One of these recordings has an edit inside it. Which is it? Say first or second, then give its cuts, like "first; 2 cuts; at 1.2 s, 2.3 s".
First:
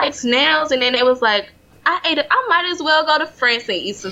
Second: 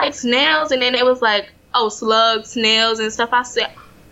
first; 1 cut; at 1.6 s